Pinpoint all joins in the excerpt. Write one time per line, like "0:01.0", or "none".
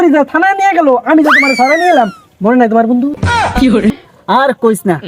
0:04.1